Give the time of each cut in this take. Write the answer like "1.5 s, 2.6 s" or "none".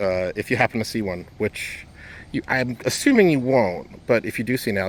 none